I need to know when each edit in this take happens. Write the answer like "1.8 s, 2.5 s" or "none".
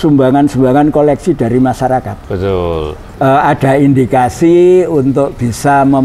3.1 s